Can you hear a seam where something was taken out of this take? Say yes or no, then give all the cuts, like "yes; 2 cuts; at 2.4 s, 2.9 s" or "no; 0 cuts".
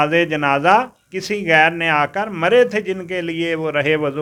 no; 0 cuts